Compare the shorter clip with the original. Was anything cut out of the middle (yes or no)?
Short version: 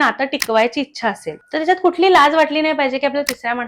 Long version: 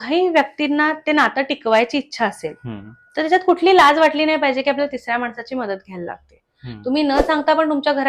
yes